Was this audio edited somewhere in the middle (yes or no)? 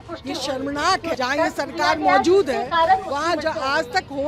yes